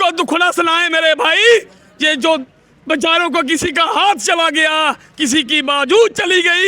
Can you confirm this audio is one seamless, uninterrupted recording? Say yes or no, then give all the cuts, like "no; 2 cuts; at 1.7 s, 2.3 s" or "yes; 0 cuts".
yes; 0 cuts